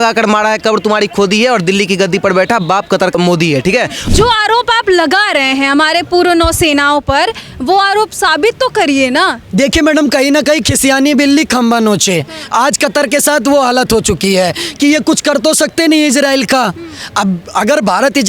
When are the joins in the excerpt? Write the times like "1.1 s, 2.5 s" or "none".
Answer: 4.0 s